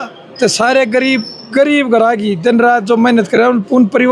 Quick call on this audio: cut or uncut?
uncut